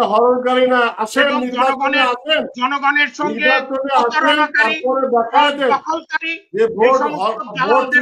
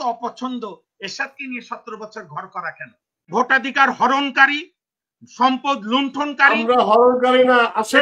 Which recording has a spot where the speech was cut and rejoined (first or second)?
second